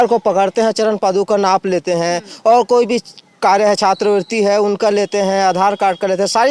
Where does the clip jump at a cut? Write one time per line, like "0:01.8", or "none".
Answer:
none